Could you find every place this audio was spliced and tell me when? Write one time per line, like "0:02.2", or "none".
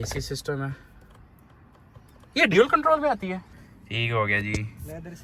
0:03.5